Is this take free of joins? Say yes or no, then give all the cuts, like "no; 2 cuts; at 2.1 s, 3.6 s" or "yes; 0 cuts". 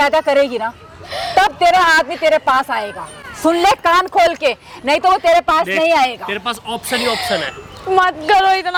yes; 0 cuts